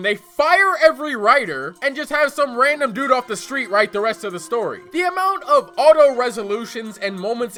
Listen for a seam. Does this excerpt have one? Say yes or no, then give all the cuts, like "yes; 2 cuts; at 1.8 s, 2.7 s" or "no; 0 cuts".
no; 0 cuts